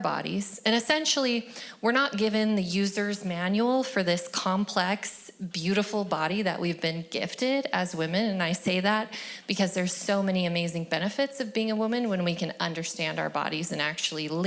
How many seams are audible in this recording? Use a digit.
0